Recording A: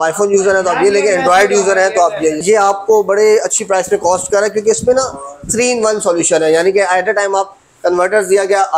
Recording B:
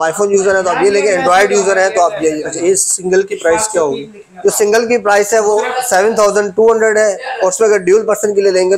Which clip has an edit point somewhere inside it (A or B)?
A